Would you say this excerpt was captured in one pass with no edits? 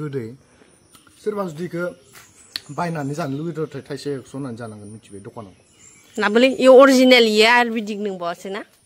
yes; 0 cuts

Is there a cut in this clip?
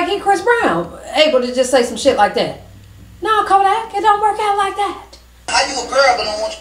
yes; 1 cut; at 5.5 s

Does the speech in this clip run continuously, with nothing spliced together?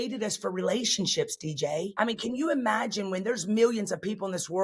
no; 1 cut; at 1.9 s

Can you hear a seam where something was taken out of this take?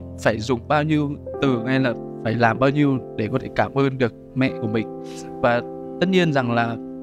no; 0 cuts

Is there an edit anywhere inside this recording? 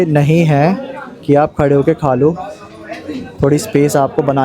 no; 0 cuts

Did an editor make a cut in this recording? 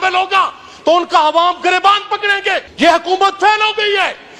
yes; 1 cut; at 2.7 s

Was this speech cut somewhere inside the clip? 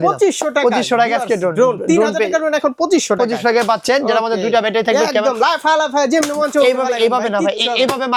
no; 0 cuts

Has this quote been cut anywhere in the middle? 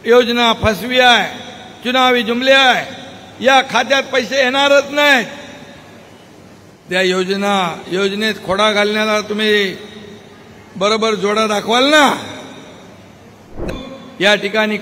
yes; 1 cut; at 13.6 s

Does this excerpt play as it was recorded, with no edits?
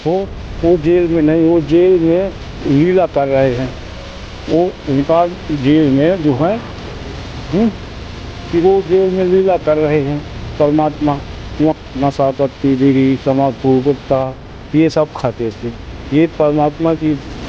no; 1 cut; at 11.7 s

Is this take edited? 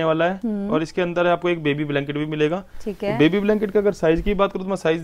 no; 0 cuts

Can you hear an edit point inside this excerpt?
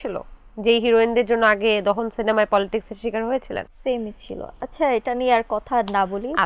no; 0 cuts

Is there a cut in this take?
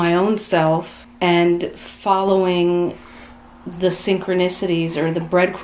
yes; 1 cut; at 1.0 s

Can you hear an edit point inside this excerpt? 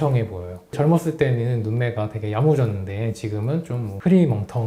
no; 0 cuts

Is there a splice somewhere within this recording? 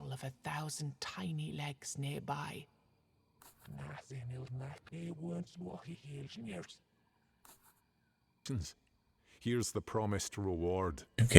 yes; 1 cut; at 8.4 s

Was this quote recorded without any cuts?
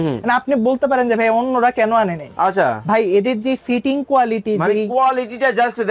yes; 0 cuts

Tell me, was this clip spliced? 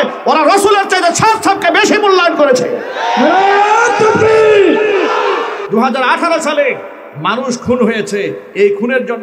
yes; 1 cut; at 5.6 s

